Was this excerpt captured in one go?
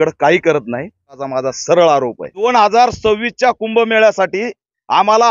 no; 2 cuts; at 1.1 s, 2.4 s

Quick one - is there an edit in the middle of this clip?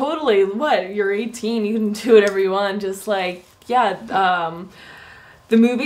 yes; 1 cut; at 3.8 s

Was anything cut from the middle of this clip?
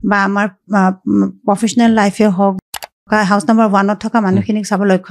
yes; 1 cut; at 2.6 s

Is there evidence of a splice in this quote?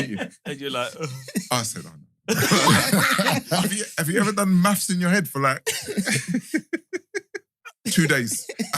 yes; 1 cut; at 3.6 s

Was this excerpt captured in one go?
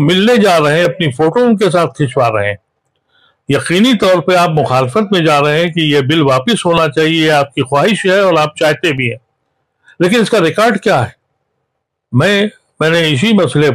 yes; 0 cuts

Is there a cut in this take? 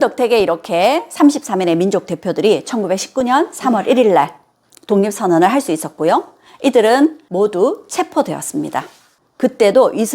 yes; 2 cuts; at 7.2 s, 9.1 s

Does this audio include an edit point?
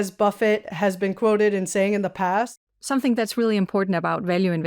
yes; 1 cut; at 2.5 s

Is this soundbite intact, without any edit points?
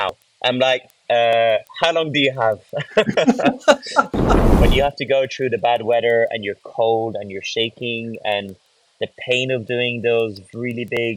no; 1 cut; at 4.5 s

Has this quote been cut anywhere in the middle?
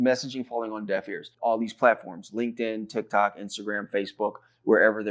yes; 1 cut; at 1.2 s

